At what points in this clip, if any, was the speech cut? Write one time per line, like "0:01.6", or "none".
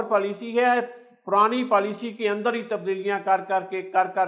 none